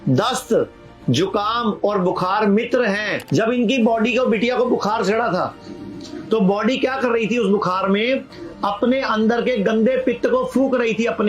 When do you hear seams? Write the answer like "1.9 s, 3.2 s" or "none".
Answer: 3.1 s